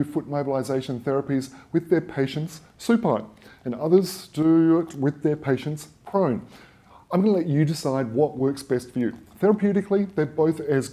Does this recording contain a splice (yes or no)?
no